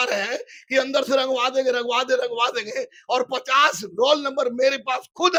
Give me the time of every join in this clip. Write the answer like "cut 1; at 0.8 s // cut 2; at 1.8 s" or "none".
none

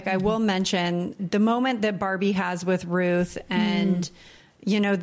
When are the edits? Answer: cut 1; at 1.2 s

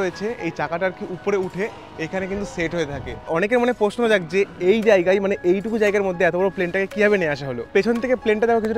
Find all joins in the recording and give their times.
cut 1; at 3.3 s // cut 2; at 7.7 s

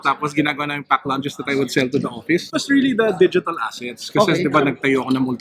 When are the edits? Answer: cut 1; at 2.6 s

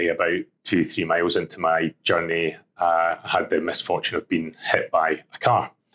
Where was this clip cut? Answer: none

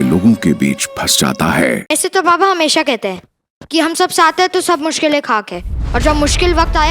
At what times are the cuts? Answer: cut 1; at 1.8 s

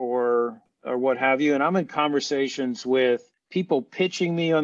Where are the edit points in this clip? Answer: cut 1; at 3.4 s

